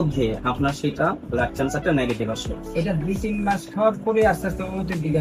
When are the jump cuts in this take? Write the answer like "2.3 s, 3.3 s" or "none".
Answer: none